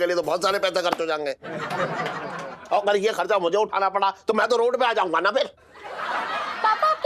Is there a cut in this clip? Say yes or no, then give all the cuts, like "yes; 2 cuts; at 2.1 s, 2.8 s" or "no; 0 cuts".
no; 0 cuts